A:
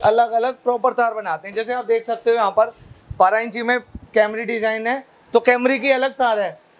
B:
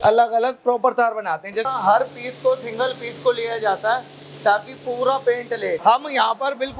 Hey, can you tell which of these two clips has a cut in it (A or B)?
B